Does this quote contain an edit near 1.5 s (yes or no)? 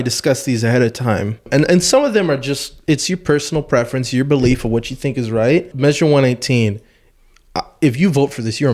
yes